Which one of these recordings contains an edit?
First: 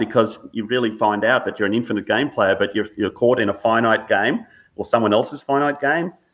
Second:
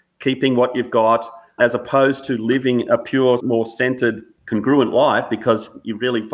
second; 2 cuts; at 3.4 s, 4.3 s

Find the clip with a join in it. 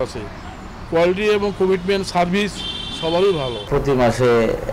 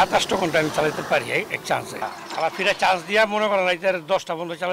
first; 1 cut; at 3.6 s

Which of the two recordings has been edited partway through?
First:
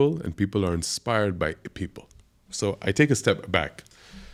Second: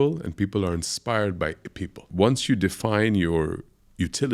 second; 1 cut; at 2.0 s

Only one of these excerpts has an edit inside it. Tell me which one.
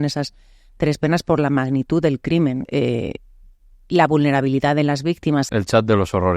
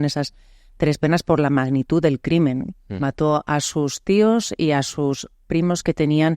first; 2 cuts; at 2.6 s, 5.5 s

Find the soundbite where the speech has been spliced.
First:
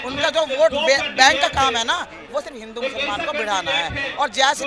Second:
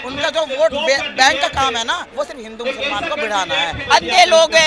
second; 2 cuts; at 2.1 s, 3.8 s

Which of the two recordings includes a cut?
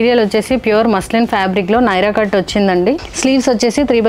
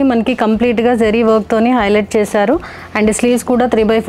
first; 1 cut; at 3.1 s

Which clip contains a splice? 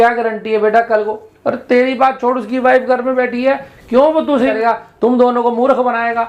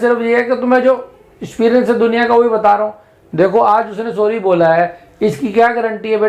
first; 1 cut; at 4.5 s

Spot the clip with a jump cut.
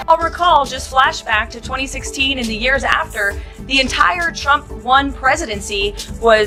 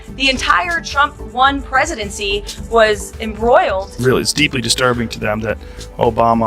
second; 1 cut; at 3.9 s

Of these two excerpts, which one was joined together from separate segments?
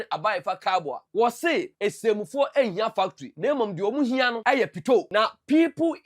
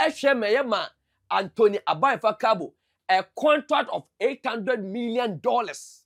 first; 5 cuts; at 1.0 s, 1.7 s, 3.2 s, 4.4 s, 5.1 s

